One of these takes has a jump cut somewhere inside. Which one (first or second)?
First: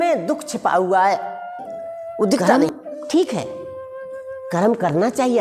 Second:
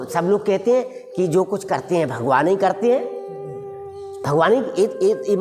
first